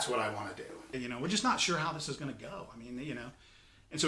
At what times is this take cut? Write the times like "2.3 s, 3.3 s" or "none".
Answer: 0.9 s

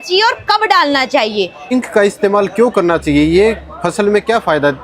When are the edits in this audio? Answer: 1.7 s

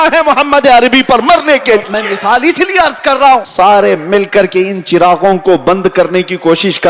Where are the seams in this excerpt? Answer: 1.9 s, 3.5 s

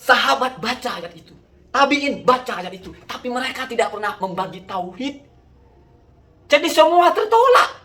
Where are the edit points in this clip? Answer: none

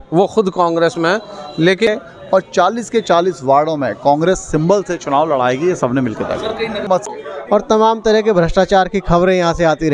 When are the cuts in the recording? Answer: 1.9 s, 7.0 s

